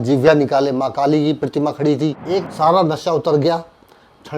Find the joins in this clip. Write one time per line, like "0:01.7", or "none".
0:02.5

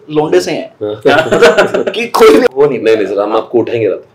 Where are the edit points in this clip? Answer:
0:02.4

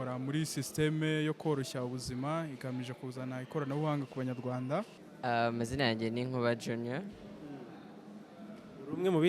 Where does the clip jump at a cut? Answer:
0:05.0

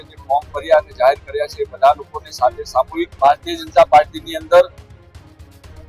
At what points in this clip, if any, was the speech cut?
0:03.1

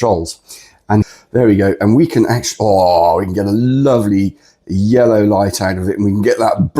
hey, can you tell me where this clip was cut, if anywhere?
0:01.1

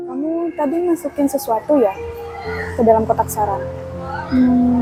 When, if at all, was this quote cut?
none

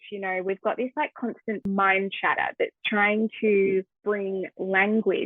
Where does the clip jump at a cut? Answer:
0:01.6
0:03.9

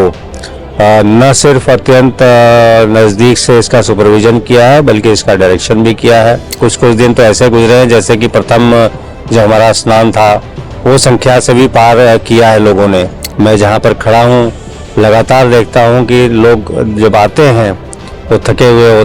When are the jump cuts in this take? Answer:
0:06.6
0:13.2

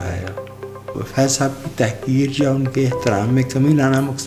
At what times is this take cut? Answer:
0:00.9

